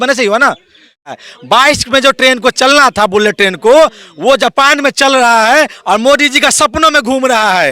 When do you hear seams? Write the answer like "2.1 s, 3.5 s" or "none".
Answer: 1.1 s